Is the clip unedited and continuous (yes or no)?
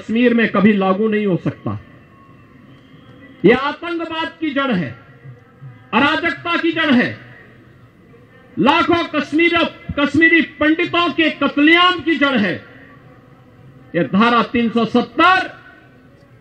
yes